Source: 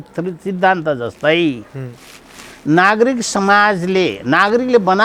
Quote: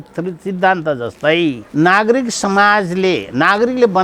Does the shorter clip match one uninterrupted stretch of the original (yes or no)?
no